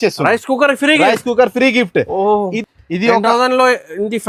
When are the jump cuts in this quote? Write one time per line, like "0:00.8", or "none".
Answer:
0:02.6